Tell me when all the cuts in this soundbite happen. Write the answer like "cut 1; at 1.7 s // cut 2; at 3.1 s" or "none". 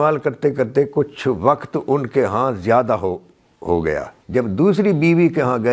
cut 1; at 4.2 s